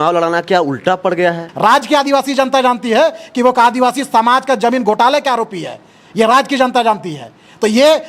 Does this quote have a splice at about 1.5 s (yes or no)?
yes